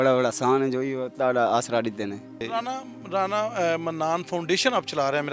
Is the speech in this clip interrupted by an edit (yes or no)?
no